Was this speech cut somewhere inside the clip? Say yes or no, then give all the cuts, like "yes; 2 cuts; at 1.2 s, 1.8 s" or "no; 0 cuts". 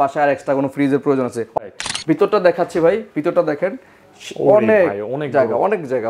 yes; 1 cut; at 1.6 s